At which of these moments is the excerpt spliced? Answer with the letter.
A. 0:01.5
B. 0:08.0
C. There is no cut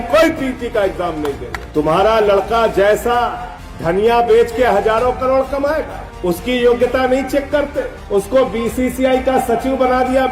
A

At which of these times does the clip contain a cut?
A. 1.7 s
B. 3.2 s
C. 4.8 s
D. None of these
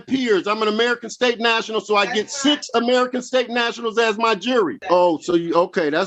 C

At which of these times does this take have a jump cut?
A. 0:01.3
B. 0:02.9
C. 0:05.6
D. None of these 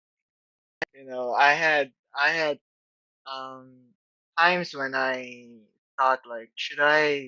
D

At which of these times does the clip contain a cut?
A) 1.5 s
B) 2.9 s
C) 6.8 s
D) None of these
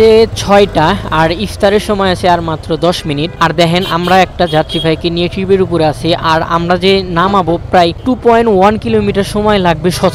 D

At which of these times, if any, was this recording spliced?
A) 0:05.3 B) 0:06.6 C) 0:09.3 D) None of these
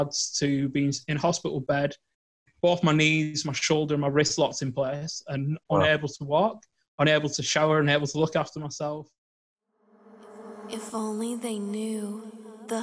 C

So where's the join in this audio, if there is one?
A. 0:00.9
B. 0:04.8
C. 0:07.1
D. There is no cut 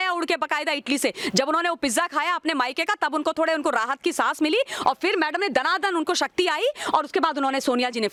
D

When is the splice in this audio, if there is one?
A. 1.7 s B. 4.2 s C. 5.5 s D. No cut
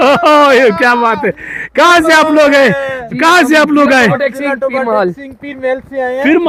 D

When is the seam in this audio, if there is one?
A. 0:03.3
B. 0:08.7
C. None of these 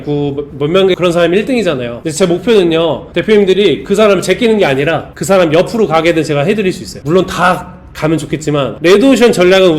B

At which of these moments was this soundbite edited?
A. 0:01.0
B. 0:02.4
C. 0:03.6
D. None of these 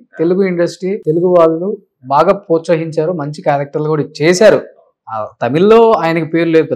A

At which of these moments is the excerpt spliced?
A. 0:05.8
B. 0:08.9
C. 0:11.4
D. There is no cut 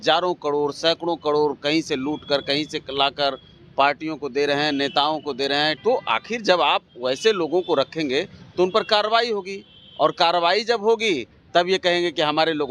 A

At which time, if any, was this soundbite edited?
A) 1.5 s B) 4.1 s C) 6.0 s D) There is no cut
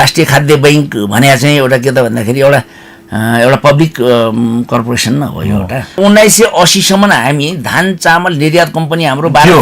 C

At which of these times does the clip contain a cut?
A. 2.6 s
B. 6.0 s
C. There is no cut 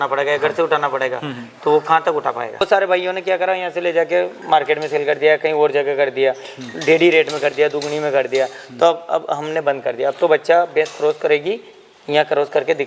A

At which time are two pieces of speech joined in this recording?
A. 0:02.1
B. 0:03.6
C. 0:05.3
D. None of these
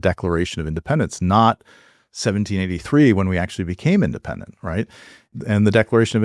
C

